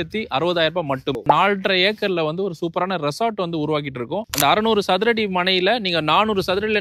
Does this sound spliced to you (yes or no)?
yes